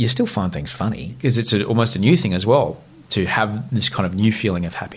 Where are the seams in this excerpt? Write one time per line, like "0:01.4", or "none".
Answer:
0:01.1